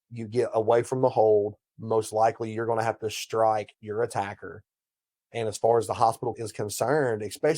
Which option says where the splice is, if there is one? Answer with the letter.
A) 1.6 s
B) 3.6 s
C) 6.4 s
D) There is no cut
C